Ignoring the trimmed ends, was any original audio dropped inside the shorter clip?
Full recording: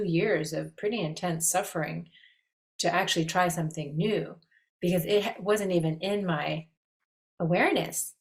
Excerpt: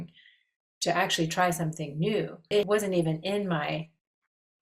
yes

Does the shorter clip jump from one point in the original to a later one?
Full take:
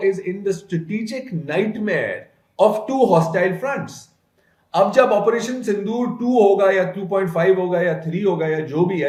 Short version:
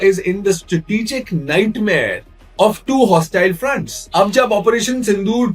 yes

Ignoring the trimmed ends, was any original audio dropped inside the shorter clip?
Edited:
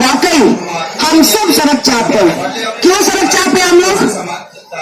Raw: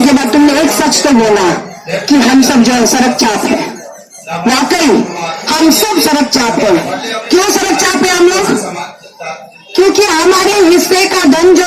no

